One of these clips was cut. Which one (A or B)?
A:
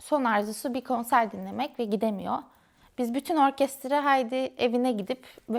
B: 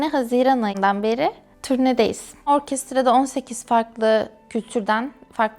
B